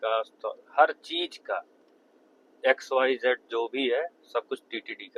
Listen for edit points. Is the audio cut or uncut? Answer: uncut